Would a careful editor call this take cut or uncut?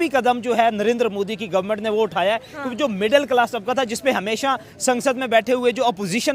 uncut